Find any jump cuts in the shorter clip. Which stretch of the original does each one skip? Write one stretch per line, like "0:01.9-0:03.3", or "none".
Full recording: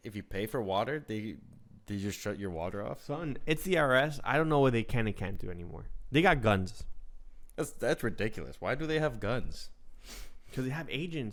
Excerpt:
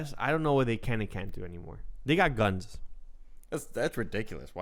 none